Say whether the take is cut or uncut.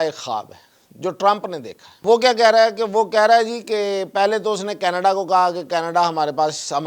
cut